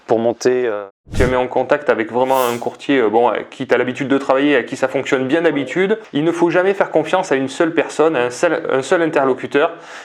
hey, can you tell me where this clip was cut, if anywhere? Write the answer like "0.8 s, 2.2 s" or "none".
1.1 s